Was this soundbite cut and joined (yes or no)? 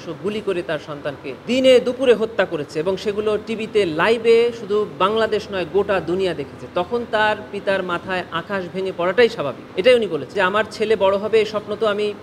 yes